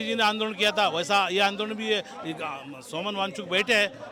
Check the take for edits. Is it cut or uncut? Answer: uncut